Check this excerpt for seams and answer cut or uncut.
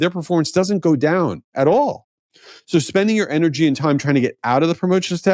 uncut